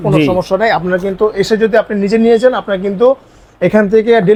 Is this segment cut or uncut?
uncut